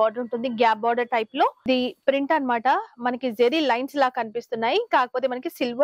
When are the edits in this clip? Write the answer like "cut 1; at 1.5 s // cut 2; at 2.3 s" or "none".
cut 1; at 1.9 s